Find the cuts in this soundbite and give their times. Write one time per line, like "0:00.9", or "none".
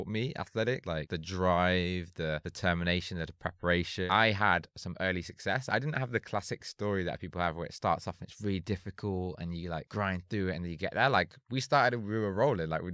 0:01.0
0:02.5
0:04.1
0:09.9